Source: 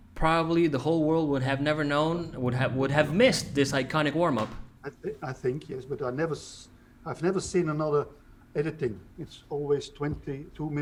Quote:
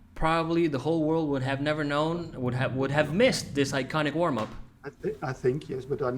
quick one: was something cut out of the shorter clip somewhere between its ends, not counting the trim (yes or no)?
no